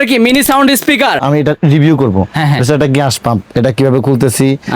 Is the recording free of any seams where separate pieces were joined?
no; 1 cut; at 1.2 s

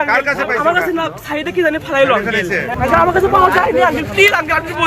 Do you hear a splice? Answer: yes; 1 cut; at 2.7 s

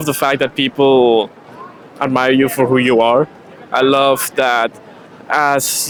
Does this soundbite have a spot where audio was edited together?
no; 0 cuts

